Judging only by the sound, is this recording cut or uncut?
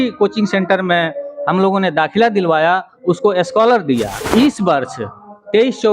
cut